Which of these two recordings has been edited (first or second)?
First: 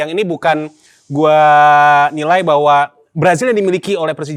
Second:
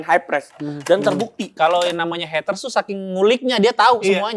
second